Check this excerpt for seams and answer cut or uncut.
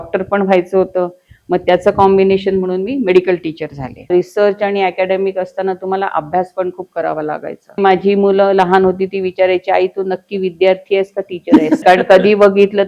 cut